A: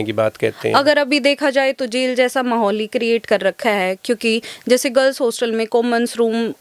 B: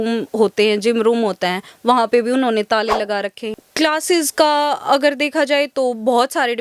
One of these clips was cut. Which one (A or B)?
B